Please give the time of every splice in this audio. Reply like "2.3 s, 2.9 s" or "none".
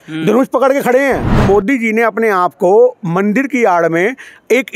1.4 s